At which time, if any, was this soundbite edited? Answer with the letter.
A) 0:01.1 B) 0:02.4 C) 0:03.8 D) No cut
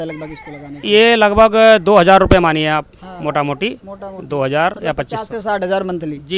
D